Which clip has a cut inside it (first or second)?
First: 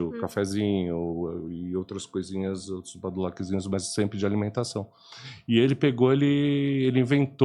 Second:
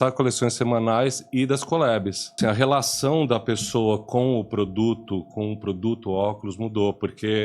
second